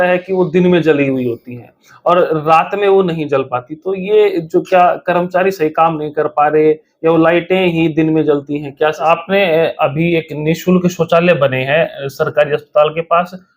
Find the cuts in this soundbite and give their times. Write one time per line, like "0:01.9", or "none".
0:09.0